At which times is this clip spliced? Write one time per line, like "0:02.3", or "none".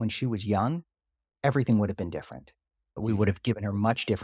0:03.0